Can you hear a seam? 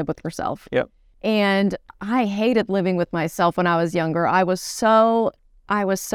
yes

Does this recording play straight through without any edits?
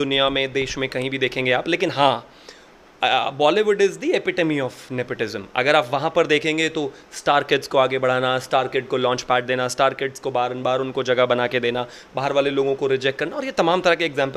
yes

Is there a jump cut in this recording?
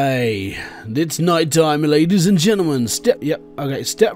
yes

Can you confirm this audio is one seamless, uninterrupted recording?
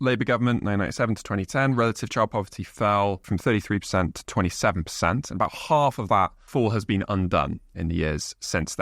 no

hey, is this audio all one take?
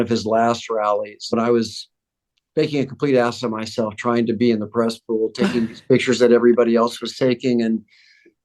no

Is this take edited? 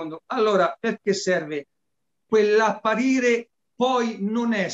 yes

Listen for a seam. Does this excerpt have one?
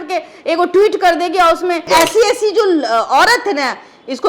yes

